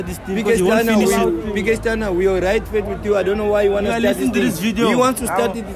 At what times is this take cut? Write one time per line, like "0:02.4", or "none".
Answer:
none